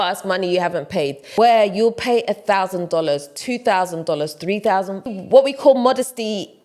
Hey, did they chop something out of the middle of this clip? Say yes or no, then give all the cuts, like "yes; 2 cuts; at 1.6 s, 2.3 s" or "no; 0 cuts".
yes; 2 cuts; at 1.2 s, 5.1 s